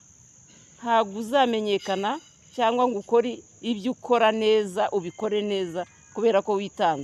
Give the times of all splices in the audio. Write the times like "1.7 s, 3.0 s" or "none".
none